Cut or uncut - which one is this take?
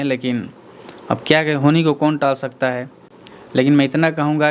uncut